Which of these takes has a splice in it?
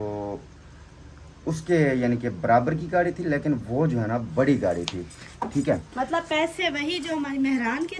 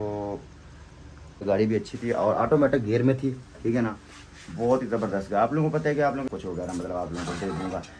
second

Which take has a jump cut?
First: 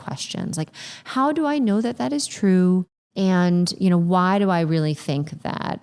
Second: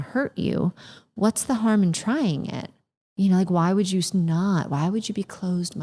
first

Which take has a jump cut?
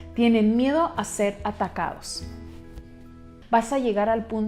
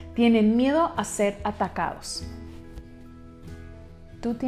first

